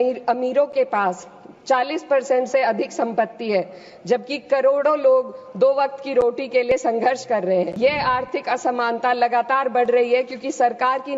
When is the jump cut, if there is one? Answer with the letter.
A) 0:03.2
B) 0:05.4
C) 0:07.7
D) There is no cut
C